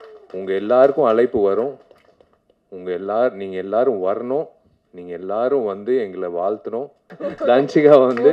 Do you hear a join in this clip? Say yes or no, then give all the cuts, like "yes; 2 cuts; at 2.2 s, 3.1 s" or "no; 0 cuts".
yes; 1 cut; at 7.0 s